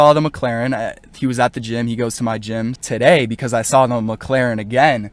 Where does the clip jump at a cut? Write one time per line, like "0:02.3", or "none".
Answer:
0:02.7